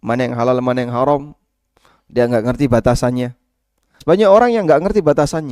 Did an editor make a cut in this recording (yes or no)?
yes